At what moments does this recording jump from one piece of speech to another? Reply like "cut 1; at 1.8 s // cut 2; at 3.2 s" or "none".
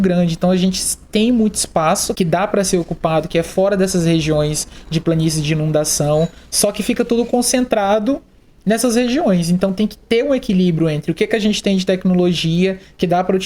cut 1; at 2.1 s